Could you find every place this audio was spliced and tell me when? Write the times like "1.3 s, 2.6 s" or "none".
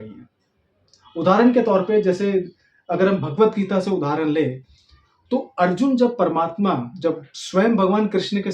none